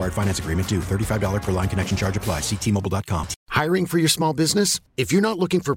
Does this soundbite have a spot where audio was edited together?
yes; 1 cut; at 3.4 s

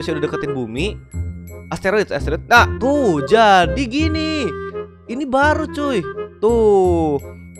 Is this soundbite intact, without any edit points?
yes; 0 cuts

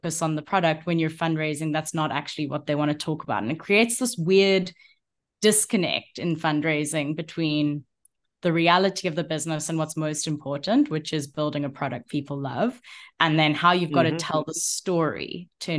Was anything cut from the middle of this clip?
no; 0 cuts

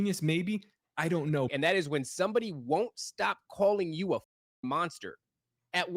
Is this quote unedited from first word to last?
no; 1 cut; at 1.5 s

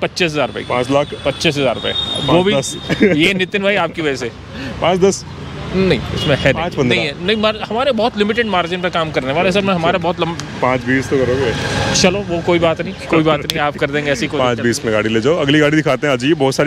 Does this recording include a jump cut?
no; 0 cuts

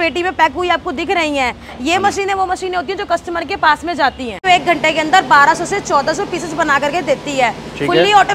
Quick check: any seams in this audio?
yes; 1 cut; at 4.4 s

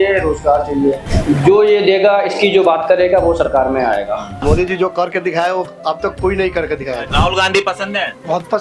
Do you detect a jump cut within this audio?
yes; 3 cuts; at 1.1 s, 4.3 s, 7.1 s

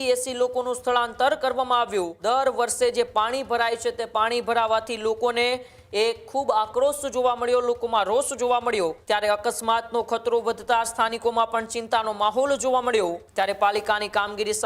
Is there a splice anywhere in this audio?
yes; 3 cuts; at 2.1 s, 9.0 s, 13.2 s

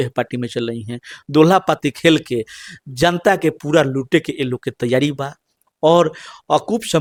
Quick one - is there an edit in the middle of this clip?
no; 0 cuts

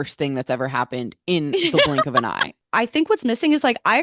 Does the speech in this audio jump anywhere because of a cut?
yes; 1 cut; at 2.6 s

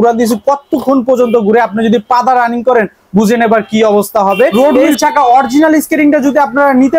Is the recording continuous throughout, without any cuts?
no; 1 cut; at 4.5 s

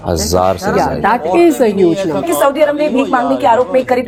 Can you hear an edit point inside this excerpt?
no; 0 cuts

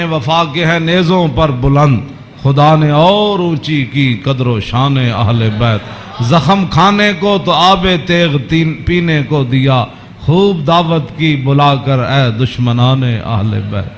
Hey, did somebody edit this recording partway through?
no; 0 cuts

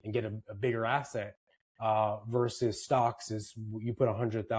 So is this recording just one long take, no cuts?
yes; 0 cuts

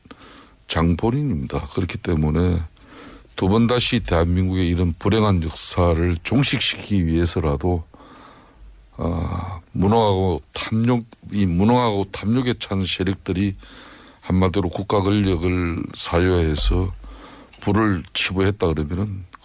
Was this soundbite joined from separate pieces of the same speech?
no; 0 cuts

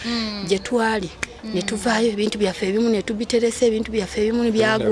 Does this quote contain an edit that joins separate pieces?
no; 0 cuts

